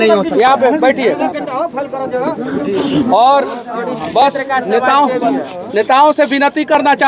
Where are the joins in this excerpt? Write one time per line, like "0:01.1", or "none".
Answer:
none